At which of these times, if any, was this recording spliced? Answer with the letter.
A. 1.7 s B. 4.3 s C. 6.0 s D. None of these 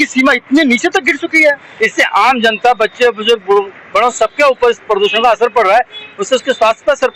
A